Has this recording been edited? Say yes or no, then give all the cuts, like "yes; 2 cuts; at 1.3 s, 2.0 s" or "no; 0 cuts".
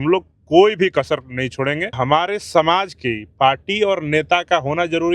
yes; 1 cut; at 2.0 s